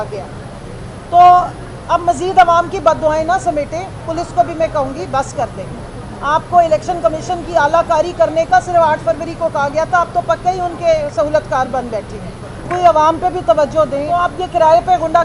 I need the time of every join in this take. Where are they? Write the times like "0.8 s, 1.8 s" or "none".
14.3 s